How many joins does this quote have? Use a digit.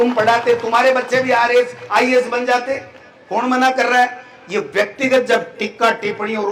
0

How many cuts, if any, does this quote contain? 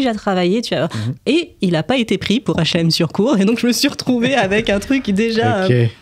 1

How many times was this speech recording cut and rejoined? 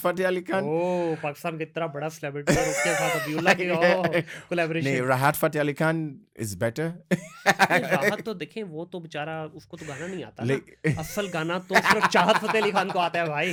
0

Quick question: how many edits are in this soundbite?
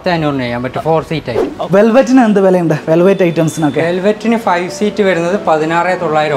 1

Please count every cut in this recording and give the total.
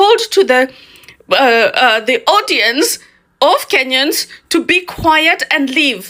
0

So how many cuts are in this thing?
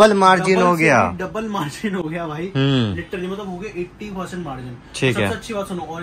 0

